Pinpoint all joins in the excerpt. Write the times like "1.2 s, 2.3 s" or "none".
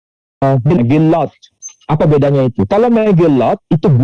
none